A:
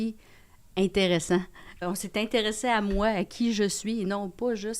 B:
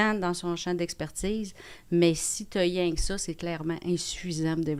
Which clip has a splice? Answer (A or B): A